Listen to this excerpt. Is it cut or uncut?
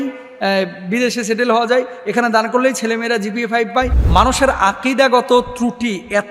cut